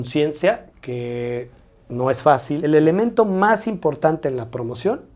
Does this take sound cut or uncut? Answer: cut